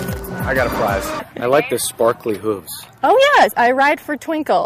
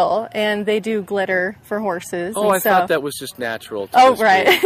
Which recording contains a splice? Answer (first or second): first